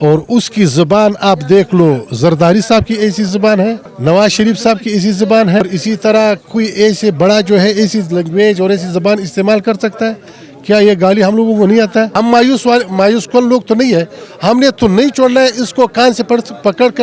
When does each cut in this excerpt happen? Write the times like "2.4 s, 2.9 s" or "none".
3.9 s, 5.6 s, 12.1 s